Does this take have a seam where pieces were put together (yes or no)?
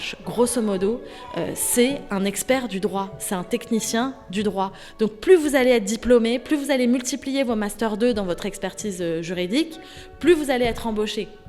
no